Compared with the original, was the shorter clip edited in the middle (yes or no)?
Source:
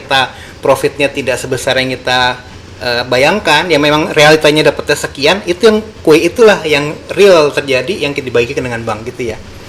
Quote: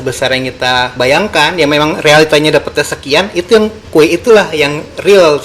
yes